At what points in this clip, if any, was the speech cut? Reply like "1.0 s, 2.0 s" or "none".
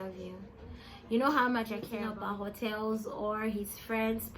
2.0 s